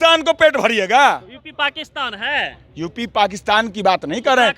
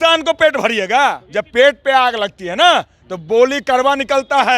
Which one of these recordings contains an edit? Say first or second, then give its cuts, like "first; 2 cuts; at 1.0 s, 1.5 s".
second; 1 cut; at 1.2 s